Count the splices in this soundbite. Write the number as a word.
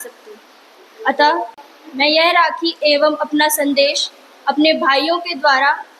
one